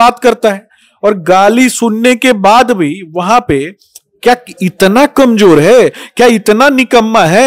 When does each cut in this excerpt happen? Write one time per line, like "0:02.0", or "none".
none